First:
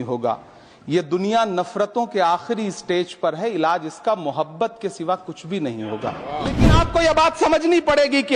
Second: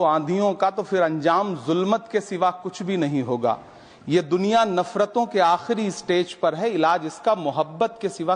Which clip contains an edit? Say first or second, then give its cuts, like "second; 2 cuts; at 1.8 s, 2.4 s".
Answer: first; 1 cut; at 6.6 s